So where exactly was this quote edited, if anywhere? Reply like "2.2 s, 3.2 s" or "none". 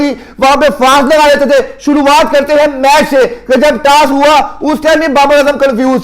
none